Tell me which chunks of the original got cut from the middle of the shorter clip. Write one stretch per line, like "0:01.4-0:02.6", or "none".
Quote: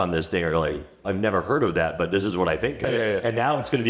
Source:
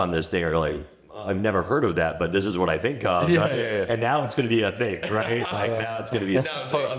0:00.9-0:01.1
0:03.1-0:03.5